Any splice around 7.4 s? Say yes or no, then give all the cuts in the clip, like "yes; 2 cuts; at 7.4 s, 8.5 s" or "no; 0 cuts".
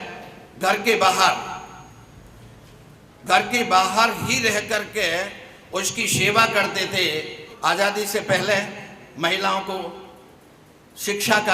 yes; 1 cut; at 7.4 s